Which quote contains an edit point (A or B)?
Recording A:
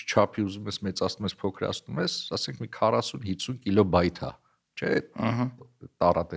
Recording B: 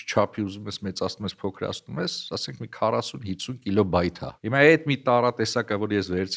B